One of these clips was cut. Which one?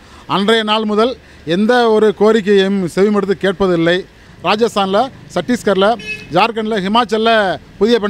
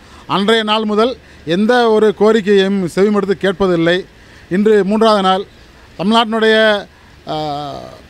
first; 1 cut; at 4.3 s

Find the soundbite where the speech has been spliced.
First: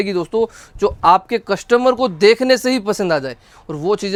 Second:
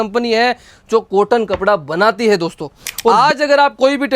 second; 1 cut; at 3.1 s

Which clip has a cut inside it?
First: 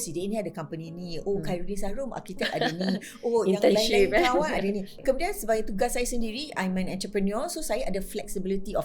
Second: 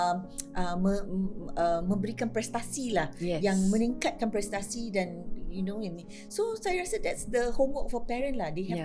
first; 1 cut; at 5.0 s

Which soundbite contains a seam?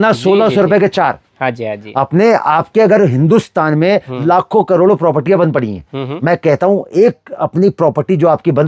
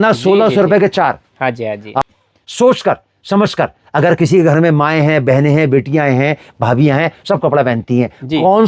second; 1 cut; at 2.1 s

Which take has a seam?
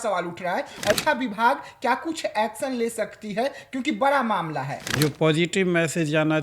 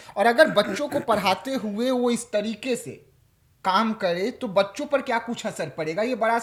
first; 2 cuts; at 0.9 s, 4.8 s

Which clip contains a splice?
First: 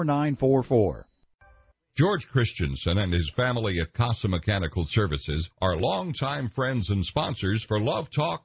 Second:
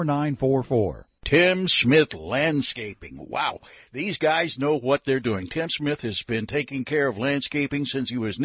first; 1 cut; at 1.2 s

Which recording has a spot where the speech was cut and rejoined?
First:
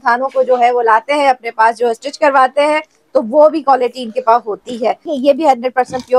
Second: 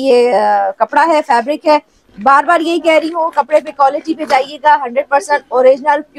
first; 1 cut; at 5.1 s

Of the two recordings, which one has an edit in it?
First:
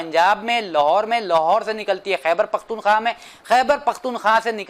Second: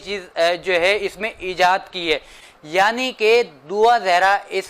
second; 1 cut; at 2.4 s

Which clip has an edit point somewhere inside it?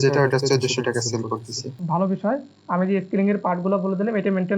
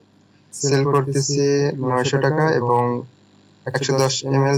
first; 1 cut; at 1.7 s

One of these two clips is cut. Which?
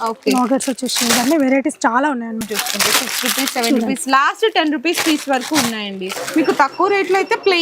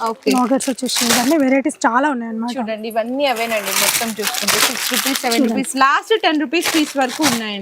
first; 2 cuts; at 2.4 s, 6.2 s

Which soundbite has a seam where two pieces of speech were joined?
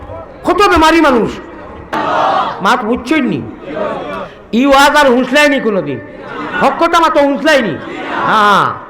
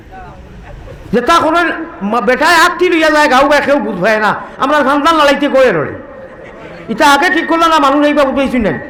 first; 1 cut; at 1.9 s

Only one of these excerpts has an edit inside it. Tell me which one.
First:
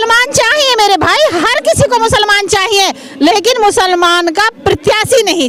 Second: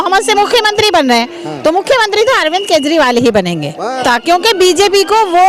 second; 1 cut; at 4.0 s

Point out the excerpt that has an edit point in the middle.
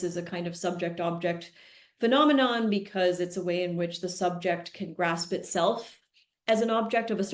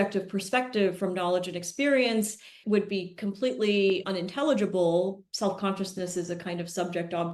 second; 2 cuts; at 2.6 s, 5.2 s

